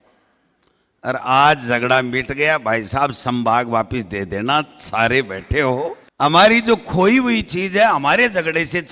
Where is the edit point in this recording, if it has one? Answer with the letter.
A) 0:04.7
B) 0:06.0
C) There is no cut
B